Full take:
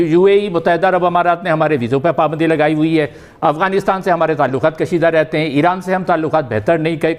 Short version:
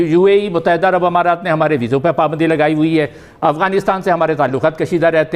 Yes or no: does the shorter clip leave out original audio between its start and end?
no